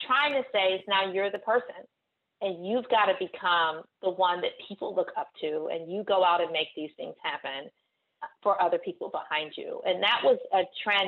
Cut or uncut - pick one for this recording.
uncut